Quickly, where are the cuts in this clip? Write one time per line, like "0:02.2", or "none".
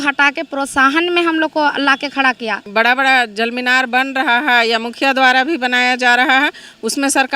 0:02.7